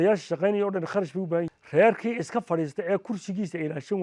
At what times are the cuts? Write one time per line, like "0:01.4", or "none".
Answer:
0:01.5